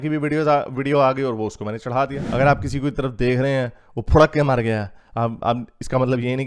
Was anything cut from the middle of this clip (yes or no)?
yes